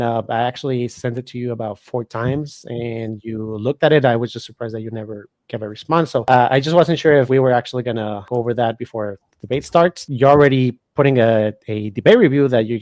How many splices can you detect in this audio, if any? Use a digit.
4